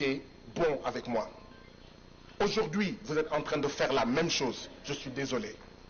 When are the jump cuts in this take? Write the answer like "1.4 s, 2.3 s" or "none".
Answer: none